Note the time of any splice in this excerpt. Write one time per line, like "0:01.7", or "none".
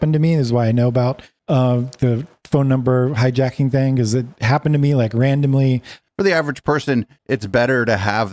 0:05.9